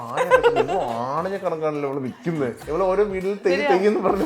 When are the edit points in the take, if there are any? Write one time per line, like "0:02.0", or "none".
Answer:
0:02.6